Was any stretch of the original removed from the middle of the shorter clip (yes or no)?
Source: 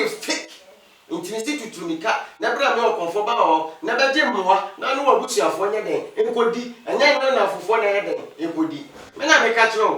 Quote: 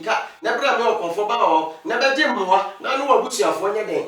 no